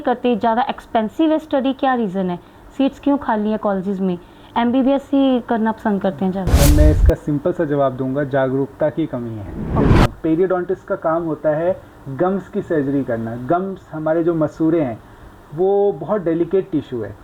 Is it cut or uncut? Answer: cut